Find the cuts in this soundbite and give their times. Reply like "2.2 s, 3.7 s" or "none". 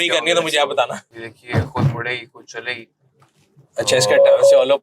1.1 s